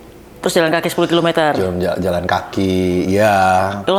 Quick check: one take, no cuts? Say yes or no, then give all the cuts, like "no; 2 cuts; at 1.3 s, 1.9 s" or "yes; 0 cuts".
yes; 0 cuts